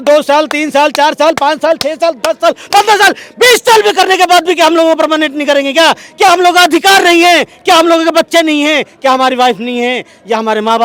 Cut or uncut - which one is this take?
uncut